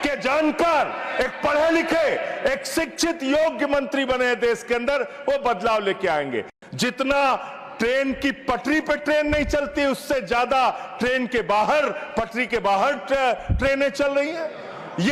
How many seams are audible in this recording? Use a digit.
1